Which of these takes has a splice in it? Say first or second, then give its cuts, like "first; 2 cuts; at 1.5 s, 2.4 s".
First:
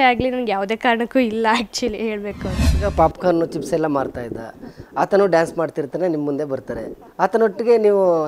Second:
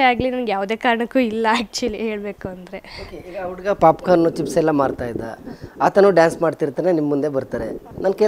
first; 2 cuts; at 2.7 s, 7.0 s